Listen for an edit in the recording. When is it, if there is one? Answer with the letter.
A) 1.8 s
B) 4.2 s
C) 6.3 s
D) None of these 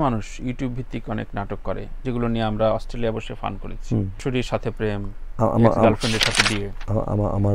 B